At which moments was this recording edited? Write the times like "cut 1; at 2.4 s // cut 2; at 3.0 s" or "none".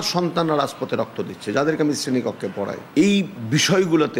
cut 1; at 2.8 s